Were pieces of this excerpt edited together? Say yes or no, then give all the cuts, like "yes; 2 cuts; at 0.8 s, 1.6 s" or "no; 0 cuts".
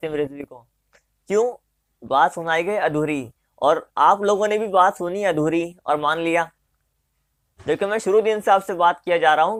no; 0 cuts